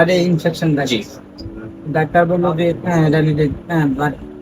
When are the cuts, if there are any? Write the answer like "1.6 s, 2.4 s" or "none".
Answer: none